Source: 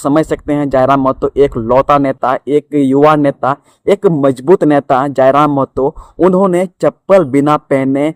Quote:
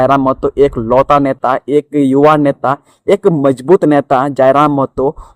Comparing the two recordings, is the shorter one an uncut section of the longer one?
yes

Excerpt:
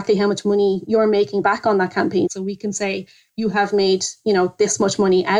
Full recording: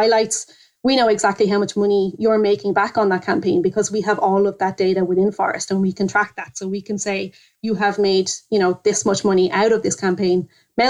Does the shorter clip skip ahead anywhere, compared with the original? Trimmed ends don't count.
yes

